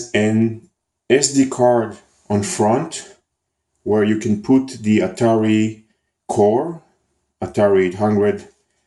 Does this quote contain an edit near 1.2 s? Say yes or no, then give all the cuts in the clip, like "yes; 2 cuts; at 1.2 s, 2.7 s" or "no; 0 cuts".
yes; 1 cut; at 1.2 s